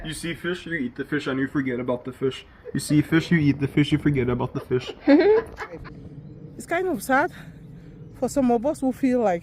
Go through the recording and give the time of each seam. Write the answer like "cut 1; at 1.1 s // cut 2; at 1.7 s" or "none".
cut 1; at 5.9 s